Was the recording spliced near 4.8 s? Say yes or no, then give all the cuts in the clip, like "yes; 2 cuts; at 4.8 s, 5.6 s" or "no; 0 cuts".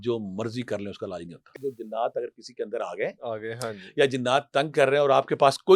no; 1 cut; at 1.6 s